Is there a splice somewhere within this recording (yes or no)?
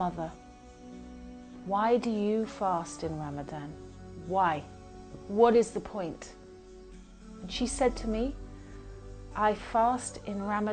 no